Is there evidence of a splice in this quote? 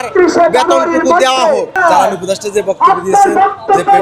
yes; 1 cut; at 1.8 s

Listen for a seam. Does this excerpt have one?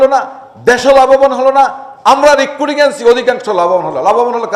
no; 0 cuts

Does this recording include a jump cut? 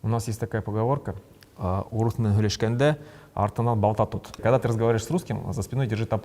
yes; 1 cut; at 4.3 s

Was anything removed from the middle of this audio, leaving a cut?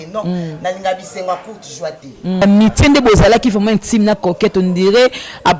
yes; 1 cut; at 2.4 s

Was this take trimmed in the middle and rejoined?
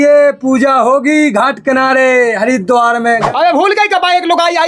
yes; 1 cut; at 3.3 s

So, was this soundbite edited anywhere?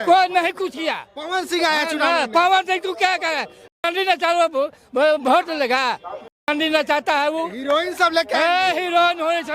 yes; 1 cut; at 1.1 s

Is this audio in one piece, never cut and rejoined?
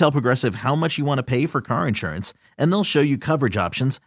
yes; 0 cuts

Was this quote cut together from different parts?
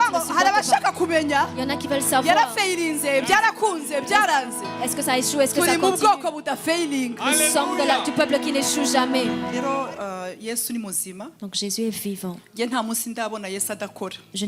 yes; 1 cut; at 9.5 s

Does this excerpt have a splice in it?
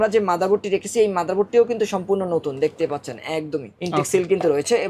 no; 0 cuts

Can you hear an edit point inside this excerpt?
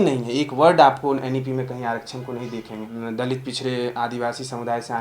yes; 1 cut; at 3.0 s

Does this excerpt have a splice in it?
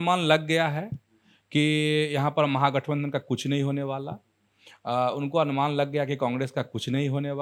no; 0 cuts

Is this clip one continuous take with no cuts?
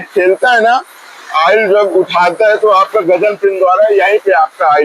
yes; 0 cuts

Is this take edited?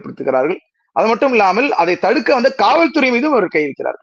no; 0 cuts

